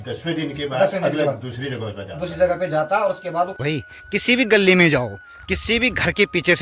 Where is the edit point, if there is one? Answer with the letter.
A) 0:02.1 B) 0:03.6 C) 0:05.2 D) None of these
B